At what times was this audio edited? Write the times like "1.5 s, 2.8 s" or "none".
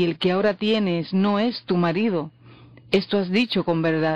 2.1 s